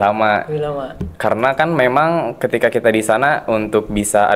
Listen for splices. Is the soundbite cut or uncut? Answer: uncut